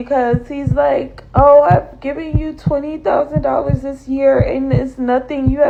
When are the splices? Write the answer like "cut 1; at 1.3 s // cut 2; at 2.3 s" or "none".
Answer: none